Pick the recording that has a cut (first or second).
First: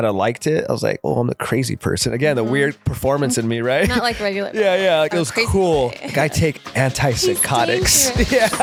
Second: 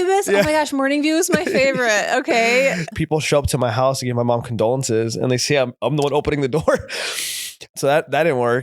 second